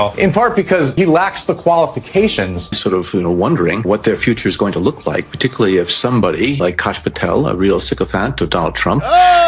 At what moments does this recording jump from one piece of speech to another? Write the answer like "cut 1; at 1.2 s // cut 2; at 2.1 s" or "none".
cut 1; at 2.7 s